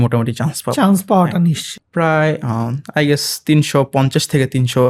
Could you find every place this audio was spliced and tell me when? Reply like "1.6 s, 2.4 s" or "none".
1.7 s